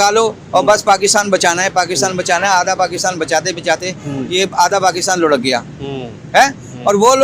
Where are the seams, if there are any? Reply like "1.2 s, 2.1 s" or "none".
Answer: 5.9 s